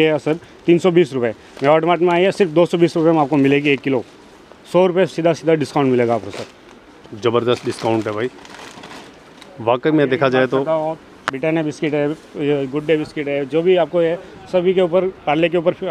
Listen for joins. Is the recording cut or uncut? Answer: uncut